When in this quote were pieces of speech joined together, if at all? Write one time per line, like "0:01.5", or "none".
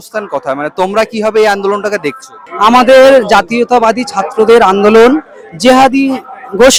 none